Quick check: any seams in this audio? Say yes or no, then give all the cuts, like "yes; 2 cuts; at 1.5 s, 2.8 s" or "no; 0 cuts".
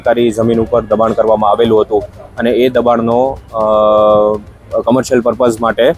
no; 0 cuts